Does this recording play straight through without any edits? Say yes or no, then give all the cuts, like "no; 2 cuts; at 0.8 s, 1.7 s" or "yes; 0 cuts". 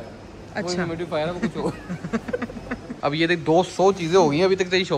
no; 1 cut; at 3.0 s